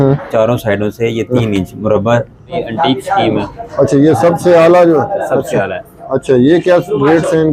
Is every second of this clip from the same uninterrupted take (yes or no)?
no